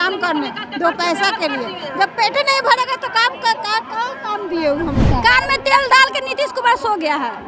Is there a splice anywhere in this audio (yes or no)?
yes